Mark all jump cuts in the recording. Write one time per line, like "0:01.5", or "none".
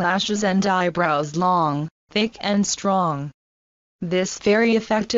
none